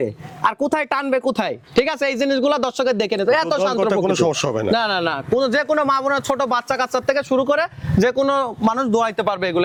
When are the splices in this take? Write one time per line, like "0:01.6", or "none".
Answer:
none